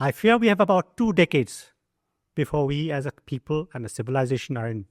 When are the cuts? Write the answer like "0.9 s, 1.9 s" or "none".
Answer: none